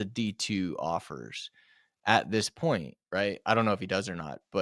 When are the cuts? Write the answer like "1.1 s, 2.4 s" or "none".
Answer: none

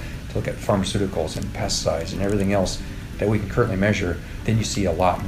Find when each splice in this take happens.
4.4 s

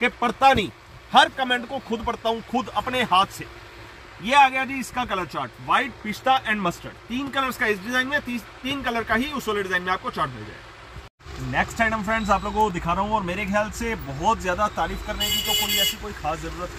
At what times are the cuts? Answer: none

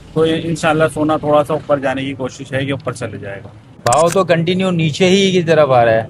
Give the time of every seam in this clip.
3.7 s

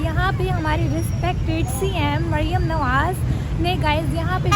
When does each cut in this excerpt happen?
none

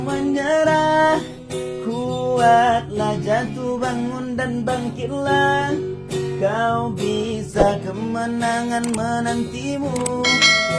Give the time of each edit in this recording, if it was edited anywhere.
none

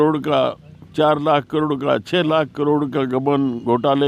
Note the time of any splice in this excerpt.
none

